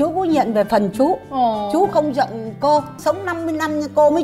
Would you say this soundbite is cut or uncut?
cut